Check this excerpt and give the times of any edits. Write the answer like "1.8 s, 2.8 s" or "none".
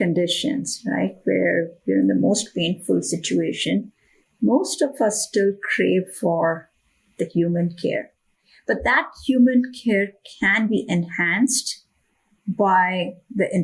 none